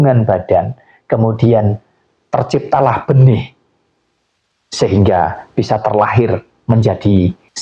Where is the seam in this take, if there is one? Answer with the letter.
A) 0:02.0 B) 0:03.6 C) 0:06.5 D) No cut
D